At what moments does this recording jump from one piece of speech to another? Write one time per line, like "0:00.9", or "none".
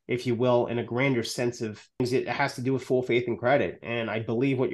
0:02.0